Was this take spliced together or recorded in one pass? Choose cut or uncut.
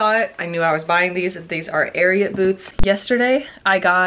cut